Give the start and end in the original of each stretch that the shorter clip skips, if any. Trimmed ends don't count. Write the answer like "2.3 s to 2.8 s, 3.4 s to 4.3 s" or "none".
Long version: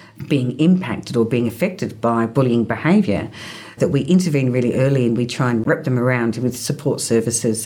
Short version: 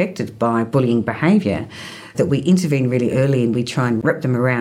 none